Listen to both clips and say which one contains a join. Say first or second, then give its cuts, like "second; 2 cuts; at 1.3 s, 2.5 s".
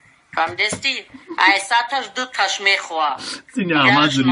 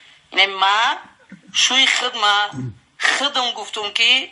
second; 1 cut; at 1.9 s